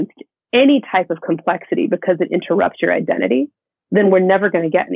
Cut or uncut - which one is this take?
uncut